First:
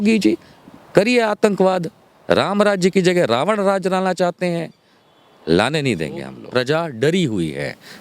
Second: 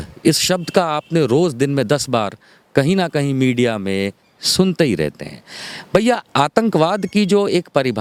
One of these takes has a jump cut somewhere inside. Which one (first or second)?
first